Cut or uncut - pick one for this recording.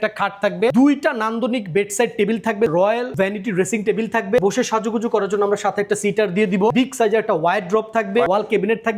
cut